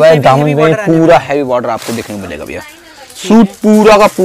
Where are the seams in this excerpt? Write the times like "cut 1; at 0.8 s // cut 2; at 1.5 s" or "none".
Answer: none